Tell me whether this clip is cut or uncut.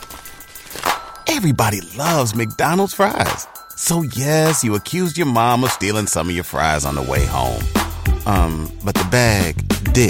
uncut